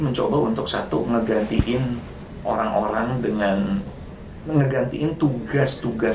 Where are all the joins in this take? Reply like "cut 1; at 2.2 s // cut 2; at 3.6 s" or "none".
none